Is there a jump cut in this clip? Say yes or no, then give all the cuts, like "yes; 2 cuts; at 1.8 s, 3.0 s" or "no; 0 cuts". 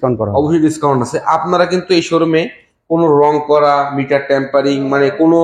no; 0 cuts